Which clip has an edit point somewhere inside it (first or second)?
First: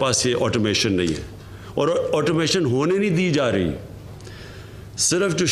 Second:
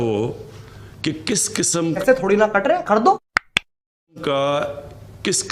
second